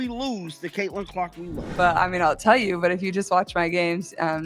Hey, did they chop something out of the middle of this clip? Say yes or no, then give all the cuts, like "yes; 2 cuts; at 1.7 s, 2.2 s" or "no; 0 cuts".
yes; 1 cut; at 1.6 s